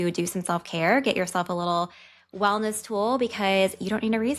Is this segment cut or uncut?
uncut